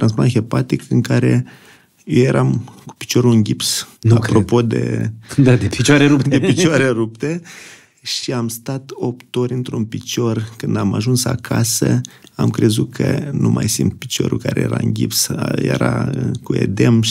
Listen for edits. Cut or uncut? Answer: uncut